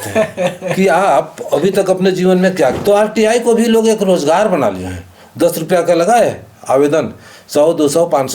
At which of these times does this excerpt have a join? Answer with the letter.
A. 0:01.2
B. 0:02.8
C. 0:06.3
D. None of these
B